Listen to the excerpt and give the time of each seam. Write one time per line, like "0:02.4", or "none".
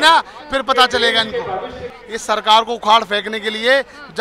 0:01.9

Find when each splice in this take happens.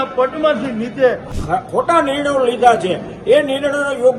0:01.3

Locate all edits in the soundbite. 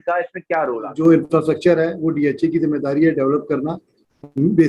0:00.9

